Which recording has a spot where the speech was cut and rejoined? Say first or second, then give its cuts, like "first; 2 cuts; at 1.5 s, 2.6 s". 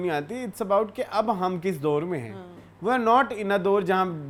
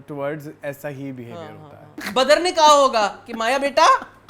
second; 1 cut; at 2.0 s